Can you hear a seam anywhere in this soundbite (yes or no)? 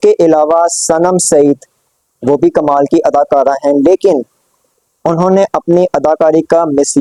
no